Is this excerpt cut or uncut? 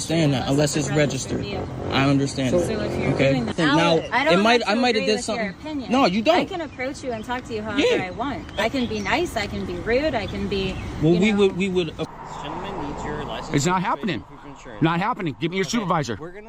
cut